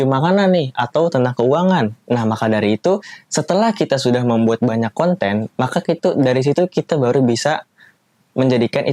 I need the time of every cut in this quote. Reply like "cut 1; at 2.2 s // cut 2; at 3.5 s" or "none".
none